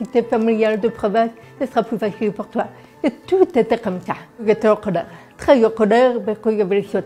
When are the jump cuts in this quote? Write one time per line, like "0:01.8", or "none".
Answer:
0:04.4
0:05.3